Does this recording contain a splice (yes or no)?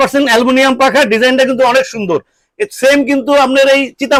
no